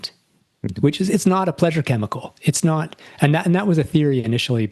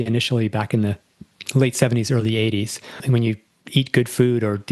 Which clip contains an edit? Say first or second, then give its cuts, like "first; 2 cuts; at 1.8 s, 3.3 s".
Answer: second; 1 cut; at 3.0 s